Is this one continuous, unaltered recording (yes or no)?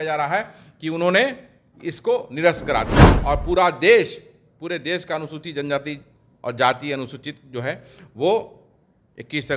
no